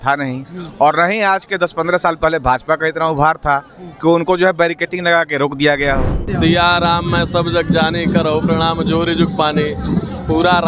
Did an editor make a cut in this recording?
yes; 1 cut; at 6.2 s

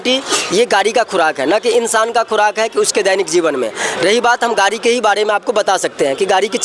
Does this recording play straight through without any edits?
yes; 0 cuts

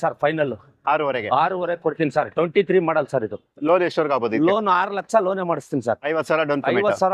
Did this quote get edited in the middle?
no; 0 cuts

